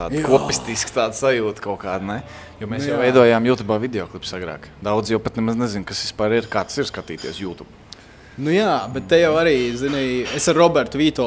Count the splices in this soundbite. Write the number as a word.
zero